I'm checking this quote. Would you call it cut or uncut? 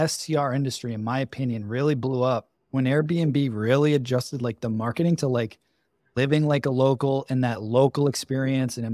cut